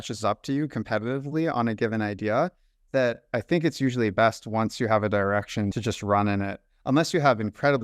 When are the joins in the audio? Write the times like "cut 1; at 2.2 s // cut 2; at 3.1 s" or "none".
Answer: none